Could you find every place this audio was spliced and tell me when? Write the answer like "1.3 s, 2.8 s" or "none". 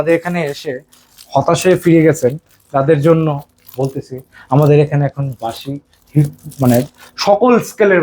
none